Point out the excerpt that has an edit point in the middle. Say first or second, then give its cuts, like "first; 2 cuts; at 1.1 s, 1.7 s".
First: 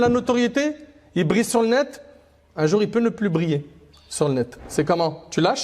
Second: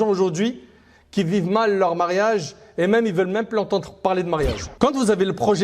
second; 1 cut; at 4.7 s